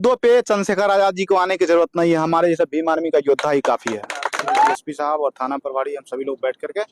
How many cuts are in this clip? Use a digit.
1